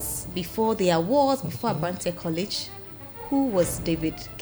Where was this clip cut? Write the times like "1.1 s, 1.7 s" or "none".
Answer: none